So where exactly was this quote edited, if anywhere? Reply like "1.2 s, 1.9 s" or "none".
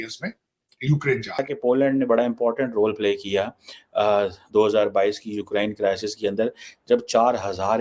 1.4 s